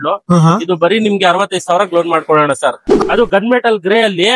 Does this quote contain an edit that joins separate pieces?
yes; 1 cut; at 2.9 s

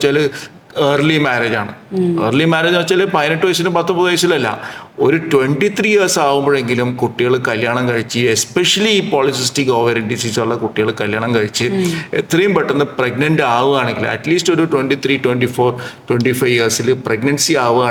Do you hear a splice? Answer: no; 0 cuts

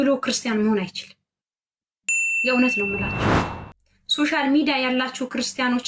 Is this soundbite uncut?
yes; 0 cuts

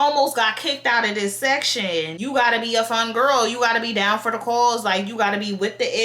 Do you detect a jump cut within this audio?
yes; 1 cut; at 2.2 s

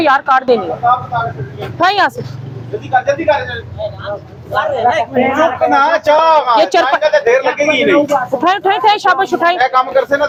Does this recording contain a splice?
no; 0 cuts

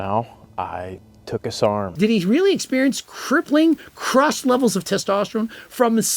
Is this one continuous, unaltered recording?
no; 1 cut; at 1.9 s

